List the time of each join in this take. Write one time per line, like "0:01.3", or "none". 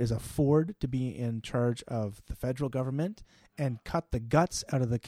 none